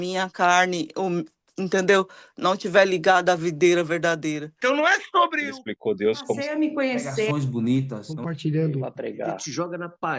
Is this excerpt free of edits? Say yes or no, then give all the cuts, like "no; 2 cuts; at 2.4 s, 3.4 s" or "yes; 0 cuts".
no; 1 cut; at 4.5 s